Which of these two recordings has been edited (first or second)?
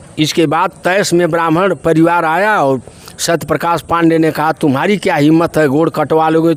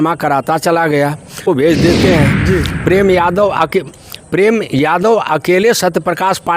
second